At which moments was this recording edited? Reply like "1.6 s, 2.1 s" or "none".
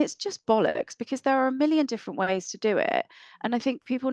none